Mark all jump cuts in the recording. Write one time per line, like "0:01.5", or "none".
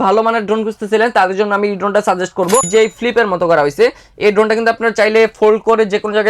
0:02.7

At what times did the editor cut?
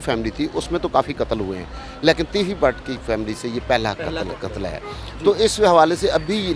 none

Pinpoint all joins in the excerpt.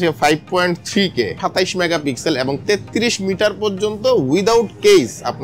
0:01.4

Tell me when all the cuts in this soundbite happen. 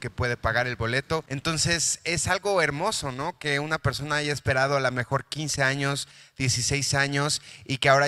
0:01.3

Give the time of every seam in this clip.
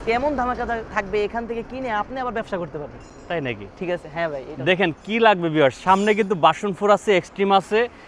none

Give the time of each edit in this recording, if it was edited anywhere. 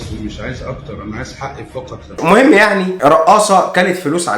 0:02.2

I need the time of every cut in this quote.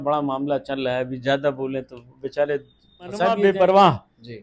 0:03.4

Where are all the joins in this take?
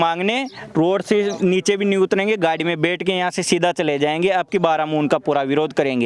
none

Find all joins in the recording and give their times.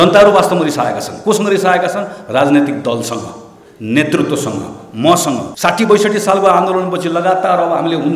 0:05.5

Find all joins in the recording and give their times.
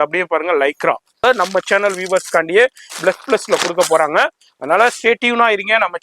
0:01.2

